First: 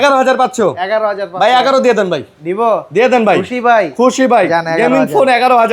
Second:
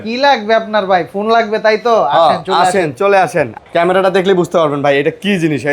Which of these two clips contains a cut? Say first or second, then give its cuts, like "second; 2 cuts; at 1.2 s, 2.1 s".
second; 1 cut; at 3.5 s